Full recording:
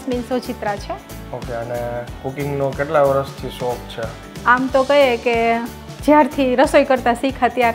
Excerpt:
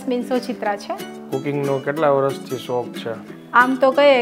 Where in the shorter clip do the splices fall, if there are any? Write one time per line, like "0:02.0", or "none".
0:01.2